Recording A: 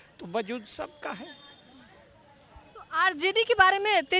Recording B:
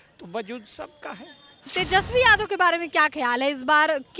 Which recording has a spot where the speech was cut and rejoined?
B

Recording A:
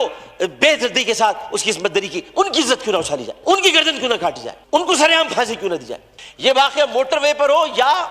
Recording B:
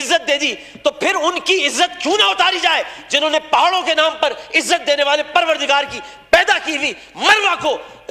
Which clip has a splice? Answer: A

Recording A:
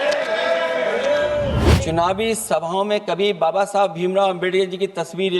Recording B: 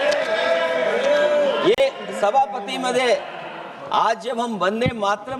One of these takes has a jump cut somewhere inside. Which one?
A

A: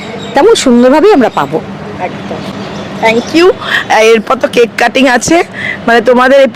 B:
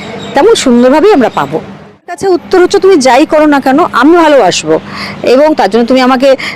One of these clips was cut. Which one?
B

